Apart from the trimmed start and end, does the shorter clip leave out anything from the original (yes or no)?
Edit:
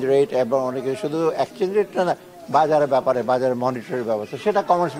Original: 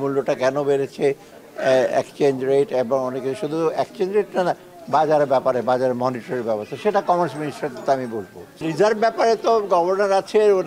no